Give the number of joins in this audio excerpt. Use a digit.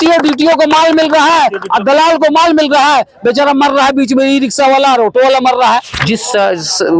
1